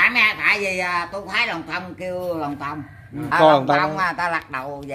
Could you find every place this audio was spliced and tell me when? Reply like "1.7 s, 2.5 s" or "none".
3.3 s